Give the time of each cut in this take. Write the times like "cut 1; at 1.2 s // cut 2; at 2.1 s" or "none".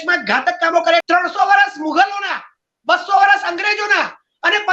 cut 1; at 1.0 s